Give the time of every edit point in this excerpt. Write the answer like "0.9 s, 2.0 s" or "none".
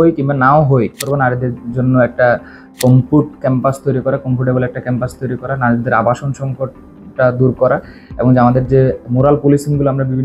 1.0 s